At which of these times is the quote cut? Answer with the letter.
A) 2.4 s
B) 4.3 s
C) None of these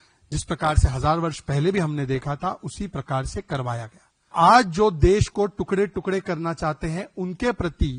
B